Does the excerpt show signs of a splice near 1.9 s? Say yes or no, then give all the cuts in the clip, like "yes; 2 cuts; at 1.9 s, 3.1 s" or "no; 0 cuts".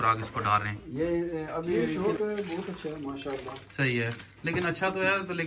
yes; 1 cut; at 1.9 s